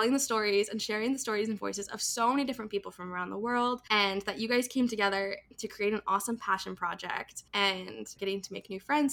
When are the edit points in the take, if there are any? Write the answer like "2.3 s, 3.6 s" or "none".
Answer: 3.8 s, 7.4 s